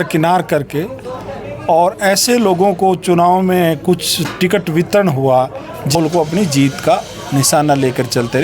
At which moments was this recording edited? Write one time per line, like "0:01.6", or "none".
0:05.9